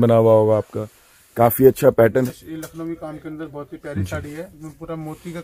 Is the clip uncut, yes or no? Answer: no